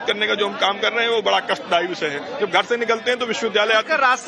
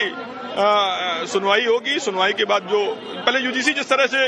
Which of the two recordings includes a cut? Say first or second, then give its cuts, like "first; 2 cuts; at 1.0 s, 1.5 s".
second; 1 cut; at 1.6 s